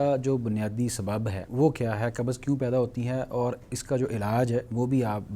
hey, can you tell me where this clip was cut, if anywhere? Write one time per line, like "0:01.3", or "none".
0:01.4